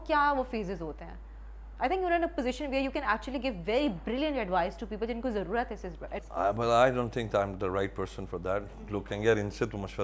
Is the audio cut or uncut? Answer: uncut